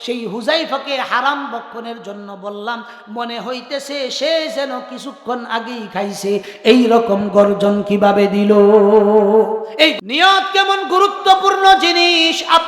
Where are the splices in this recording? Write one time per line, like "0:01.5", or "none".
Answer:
0:09.9